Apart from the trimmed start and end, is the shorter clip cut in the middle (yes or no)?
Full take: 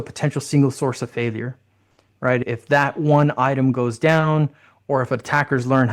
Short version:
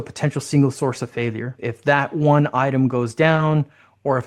yes